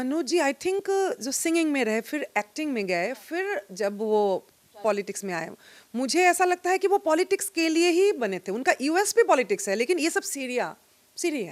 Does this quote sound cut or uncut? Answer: uncut